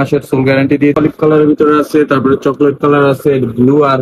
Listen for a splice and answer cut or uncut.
cut